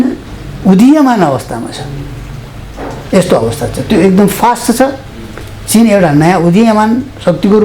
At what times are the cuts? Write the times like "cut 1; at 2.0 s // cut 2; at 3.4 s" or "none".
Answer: none

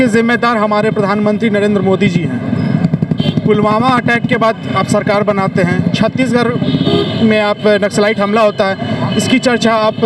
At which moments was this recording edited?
none

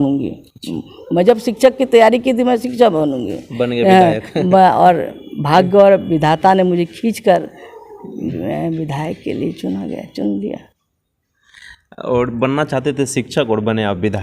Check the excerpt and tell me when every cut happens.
none

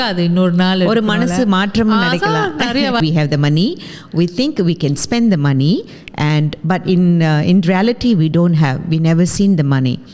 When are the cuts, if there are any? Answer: cut 1; at 3.0 s

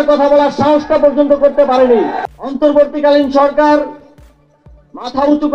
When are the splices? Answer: cut 1; at 2.4 s

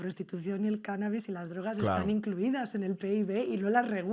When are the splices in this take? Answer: none

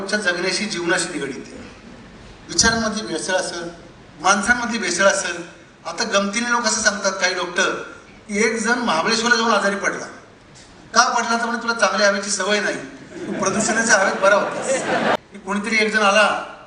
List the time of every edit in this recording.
cut 1; at 15.2 s

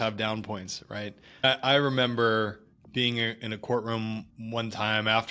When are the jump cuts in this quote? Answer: cut 1; at 1.4 s

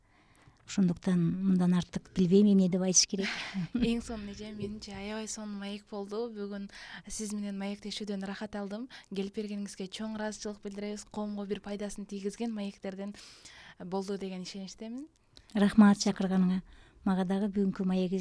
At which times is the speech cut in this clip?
none

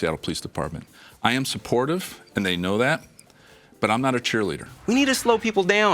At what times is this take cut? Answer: cut 1; at 4.6 s

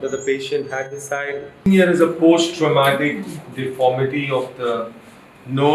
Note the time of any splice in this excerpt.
cut 1; at 1.5 s

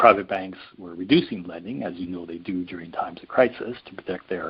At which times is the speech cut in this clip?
none

